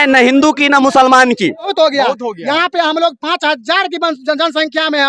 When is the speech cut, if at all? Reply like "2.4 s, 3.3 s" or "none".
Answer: 1.7 s